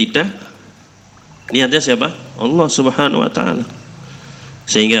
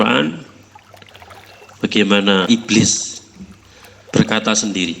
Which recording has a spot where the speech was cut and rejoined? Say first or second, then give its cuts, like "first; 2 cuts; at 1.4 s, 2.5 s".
second; 1 cut; at 2.6 s